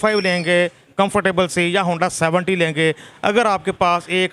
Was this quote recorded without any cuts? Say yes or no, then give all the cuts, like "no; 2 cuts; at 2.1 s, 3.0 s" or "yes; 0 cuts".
yes; 0 cuts